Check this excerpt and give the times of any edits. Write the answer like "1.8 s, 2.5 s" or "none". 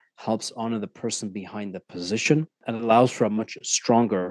2.6 s